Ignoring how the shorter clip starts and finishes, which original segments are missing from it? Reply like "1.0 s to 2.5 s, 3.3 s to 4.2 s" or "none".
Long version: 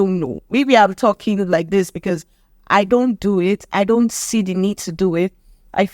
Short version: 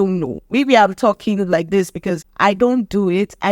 2.3 s to 2.6 s